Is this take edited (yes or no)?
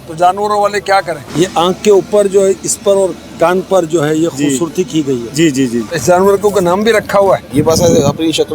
yes